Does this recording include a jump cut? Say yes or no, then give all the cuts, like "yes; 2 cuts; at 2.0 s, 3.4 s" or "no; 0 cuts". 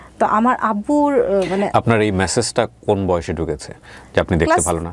no; 0 cuts